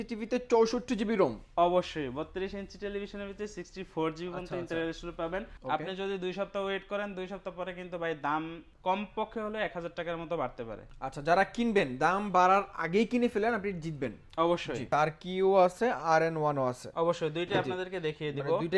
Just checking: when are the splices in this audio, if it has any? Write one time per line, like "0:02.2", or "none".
0:05.5
0:08.6
0:10.8
0:14.9